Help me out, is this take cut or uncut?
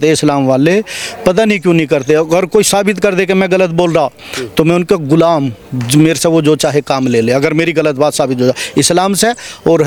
uncut